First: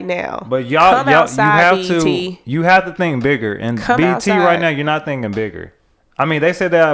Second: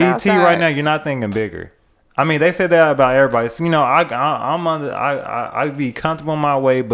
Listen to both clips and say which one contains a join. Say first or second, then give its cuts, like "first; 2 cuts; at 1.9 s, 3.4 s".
first; 1 cut; at 2.4 s